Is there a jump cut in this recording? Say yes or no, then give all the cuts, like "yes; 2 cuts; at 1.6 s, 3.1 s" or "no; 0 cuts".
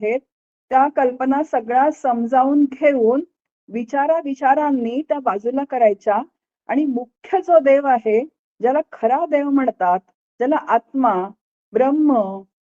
no; 0 cuts